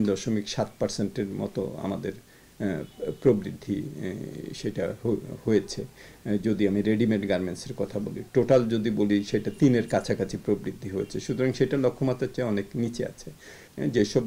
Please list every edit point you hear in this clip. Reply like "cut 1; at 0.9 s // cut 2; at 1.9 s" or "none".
none